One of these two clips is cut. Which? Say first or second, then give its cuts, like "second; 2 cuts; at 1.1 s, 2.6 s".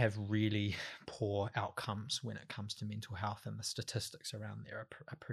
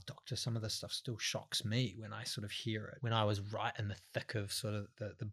second; 1 cut; at 2.9 s